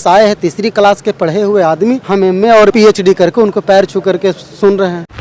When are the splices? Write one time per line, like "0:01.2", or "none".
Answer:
0:02.0
0:02.7